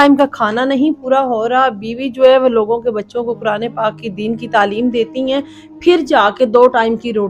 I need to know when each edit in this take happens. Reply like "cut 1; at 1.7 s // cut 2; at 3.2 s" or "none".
none